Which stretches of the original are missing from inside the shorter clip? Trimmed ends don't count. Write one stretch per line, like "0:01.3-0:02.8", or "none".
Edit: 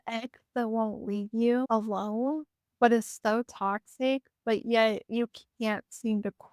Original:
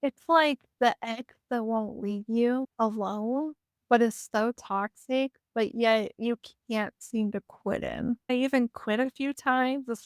0:02.6-0:02.8